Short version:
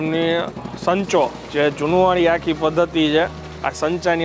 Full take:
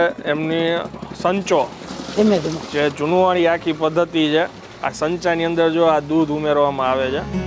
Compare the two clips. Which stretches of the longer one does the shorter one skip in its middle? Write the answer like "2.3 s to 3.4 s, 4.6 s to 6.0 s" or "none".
1.8 s to 2.6 s